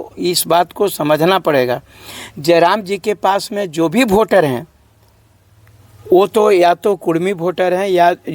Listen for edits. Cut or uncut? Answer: uncut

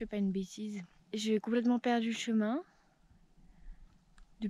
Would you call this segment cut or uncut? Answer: cut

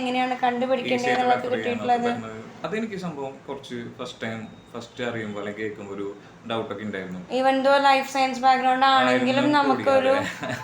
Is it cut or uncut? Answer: cut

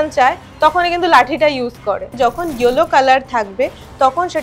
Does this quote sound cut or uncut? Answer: cut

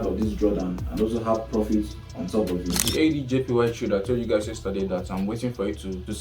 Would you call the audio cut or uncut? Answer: cut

